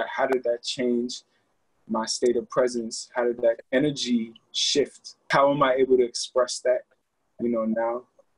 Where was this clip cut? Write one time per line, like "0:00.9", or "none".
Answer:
0:03.6

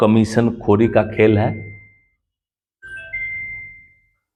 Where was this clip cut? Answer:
none

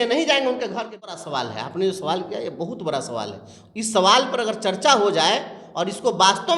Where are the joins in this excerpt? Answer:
0:01.2

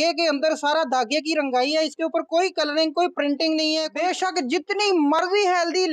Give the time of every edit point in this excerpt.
0:03.9

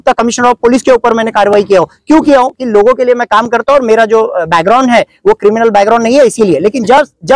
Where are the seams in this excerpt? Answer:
none

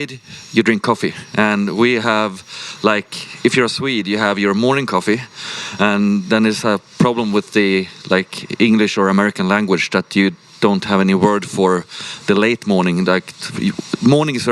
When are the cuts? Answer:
none

